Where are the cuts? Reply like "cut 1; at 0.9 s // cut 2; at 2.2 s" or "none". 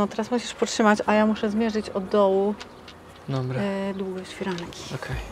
none